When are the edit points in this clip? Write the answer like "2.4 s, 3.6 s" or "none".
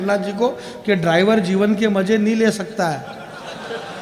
none